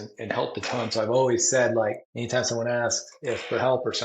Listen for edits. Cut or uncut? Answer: cut